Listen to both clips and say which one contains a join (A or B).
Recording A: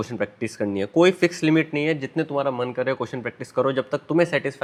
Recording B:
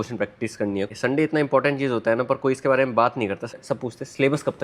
B